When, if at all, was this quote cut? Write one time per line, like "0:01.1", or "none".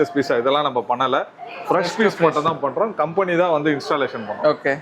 none